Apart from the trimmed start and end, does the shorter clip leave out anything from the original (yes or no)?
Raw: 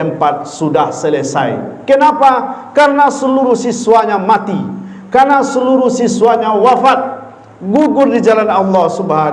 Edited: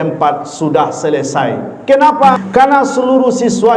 yes